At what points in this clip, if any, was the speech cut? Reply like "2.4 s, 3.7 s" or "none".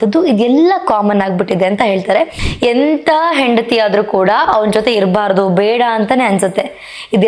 2.4 s